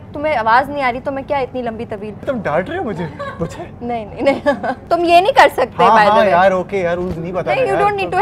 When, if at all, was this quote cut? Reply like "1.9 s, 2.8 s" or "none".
2.3 s, 4.8 s